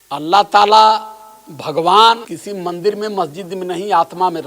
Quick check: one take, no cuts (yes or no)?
no